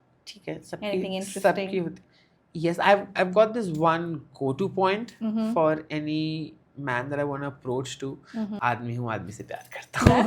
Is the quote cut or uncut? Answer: cut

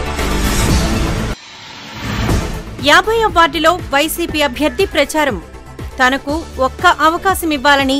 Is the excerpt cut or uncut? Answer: uncut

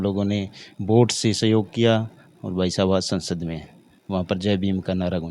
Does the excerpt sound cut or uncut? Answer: uncut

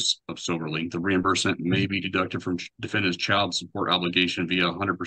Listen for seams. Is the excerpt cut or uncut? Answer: uncut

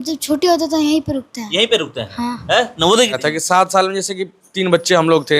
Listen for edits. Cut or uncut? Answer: cut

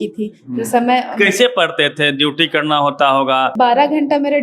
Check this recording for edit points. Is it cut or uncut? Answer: cut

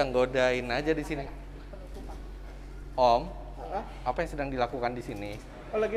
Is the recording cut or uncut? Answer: uncut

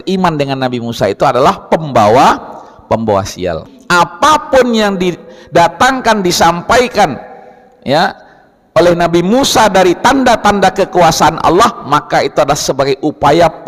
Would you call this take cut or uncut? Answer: cut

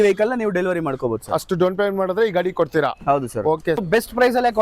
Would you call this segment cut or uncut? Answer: cut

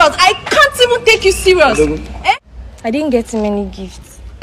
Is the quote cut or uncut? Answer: cut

